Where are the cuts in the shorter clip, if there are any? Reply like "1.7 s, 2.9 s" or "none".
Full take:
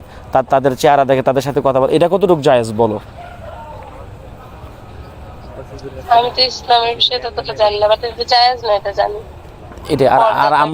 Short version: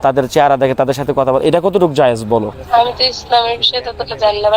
2.6 s

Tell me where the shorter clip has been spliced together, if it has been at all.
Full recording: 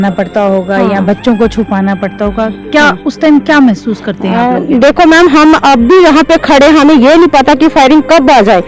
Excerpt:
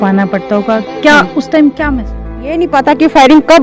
2.6 s

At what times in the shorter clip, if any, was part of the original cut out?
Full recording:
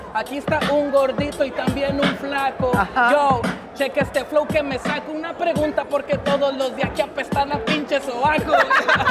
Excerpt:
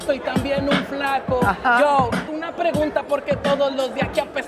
2.3 s

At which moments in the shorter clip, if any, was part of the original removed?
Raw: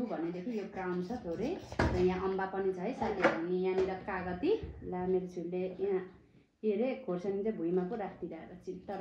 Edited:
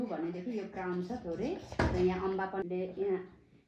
2.6 s

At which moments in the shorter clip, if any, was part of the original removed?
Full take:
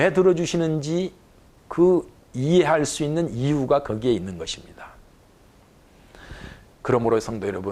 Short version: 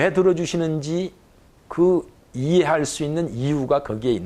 none

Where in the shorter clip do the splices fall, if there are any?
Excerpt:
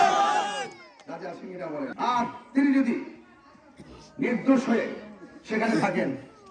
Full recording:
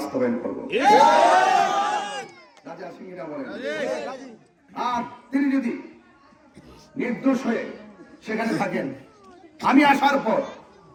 1.9 s

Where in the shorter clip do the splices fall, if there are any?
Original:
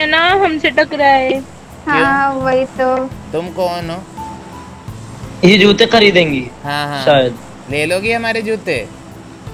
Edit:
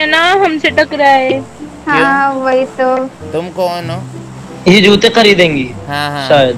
4.1 s

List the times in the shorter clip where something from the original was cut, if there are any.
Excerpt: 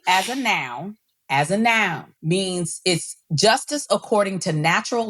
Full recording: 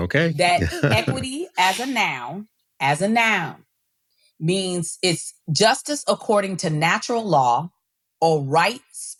2.1 s

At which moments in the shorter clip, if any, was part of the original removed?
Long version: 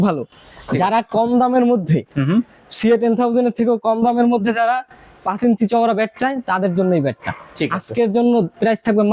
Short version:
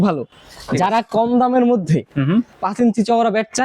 2.6 s

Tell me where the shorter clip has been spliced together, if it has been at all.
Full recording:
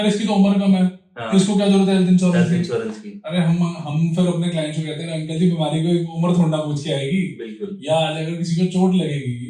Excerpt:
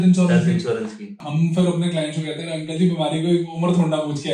1.2 s

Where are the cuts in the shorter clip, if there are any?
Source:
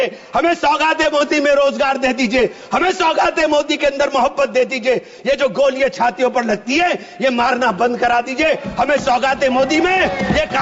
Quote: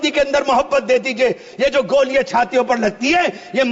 none

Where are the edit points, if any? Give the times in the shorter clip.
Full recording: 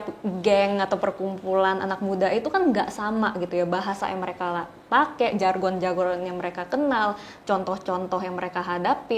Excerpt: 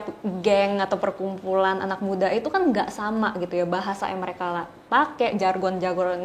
none

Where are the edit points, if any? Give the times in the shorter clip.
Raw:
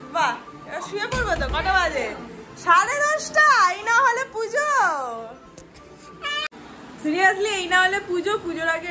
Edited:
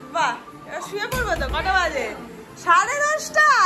none

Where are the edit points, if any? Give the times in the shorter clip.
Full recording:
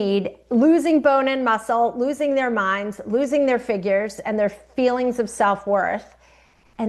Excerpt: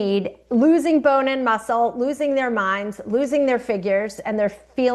none

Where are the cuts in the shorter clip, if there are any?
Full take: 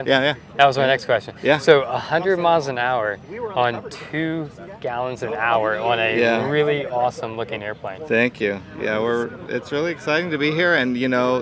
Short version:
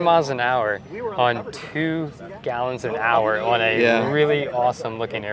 none

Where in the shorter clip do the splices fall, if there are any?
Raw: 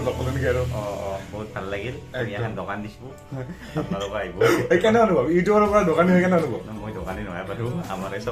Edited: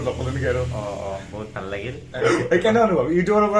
2.2 s

